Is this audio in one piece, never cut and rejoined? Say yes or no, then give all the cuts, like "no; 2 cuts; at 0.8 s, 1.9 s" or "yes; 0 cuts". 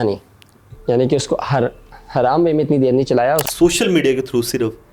no; 1 cut; at 3.5 s